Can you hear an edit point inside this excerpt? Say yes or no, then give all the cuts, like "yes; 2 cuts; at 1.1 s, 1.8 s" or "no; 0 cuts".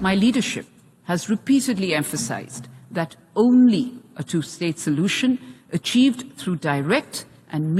no; 0 cuts